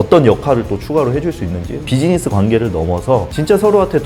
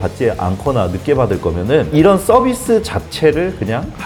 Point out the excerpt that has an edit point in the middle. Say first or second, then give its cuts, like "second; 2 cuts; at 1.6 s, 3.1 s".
first; 1 cut; at 1.9 s